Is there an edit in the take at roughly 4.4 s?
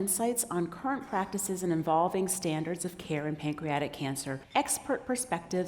yes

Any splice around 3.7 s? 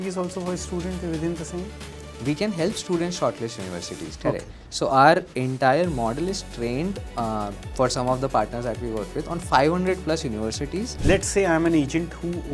no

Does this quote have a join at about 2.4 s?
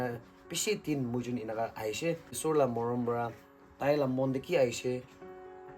yes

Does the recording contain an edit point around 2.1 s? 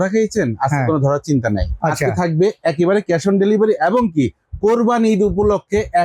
no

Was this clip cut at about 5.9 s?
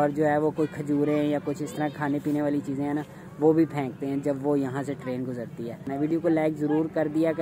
yes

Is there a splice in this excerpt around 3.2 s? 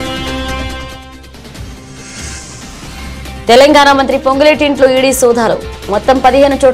yes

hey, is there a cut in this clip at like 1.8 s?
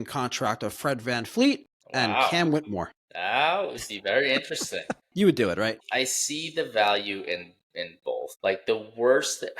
no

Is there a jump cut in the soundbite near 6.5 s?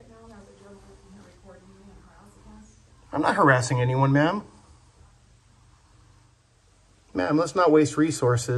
yes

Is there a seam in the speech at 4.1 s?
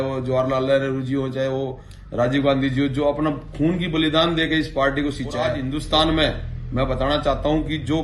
no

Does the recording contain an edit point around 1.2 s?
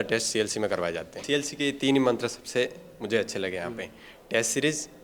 yes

